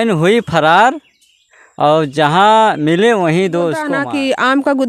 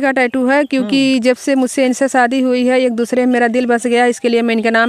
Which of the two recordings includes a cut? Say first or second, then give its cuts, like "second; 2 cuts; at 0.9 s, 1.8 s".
first; 1 cut; at 3.9 s